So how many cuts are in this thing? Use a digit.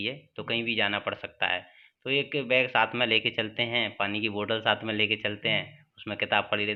0